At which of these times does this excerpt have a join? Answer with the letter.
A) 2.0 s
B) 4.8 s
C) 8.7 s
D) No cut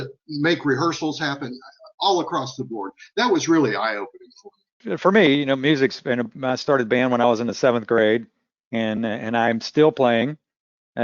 B